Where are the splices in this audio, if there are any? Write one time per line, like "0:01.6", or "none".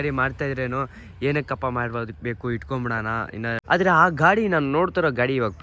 0:03.5

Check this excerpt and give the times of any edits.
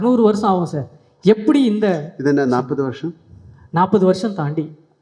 none

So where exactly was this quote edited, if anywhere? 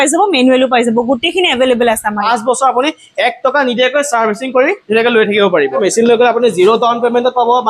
0:02.2
0:05.8

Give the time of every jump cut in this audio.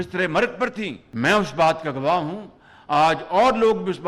0:01.0

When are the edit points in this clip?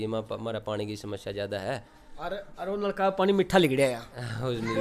none

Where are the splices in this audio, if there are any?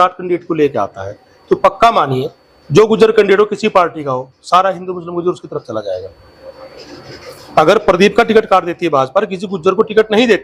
none

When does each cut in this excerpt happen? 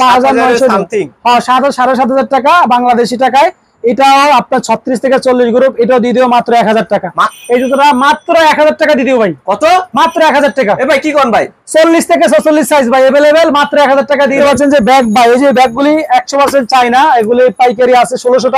0:07.3
0:14.4

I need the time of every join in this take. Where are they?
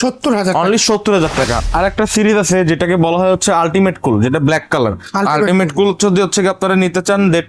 0:01.6

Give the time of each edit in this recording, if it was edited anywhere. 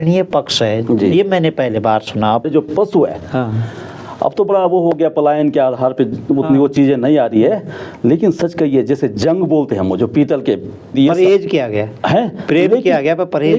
0:02.5
0:10.9

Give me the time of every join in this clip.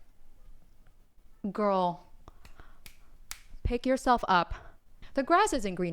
0:05.0

